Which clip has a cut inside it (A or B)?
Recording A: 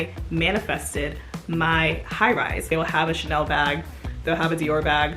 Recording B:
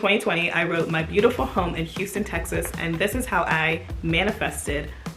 A